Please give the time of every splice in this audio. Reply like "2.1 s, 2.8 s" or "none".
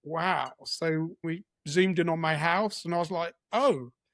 1.2 s